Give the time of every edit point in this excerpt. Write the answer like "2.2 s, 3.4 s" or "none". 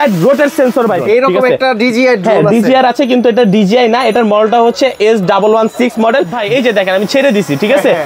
1.0 s, 6.4 s